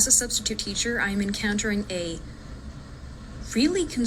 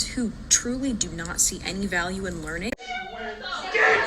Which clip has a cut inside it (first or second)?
second